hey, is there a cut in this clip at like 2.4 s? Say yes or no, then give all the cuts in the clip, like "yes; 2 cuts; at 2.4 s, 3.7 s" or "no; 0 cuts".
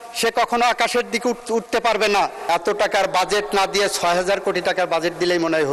yes; 1 cut; at 2.4 s